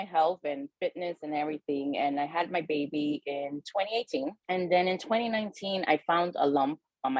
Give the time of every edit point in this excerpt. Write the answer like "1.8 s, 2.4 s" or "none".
4.4 s